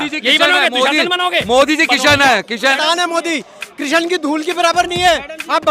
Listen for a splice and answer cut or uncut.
cut